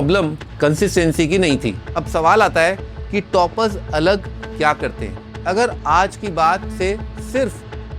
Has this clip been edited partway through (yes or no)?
yes